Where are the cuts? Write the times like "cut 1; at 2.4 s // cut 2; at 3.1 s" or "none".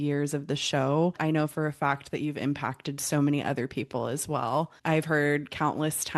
cut 1; at 1.2 s // cut 2; at 4.7 s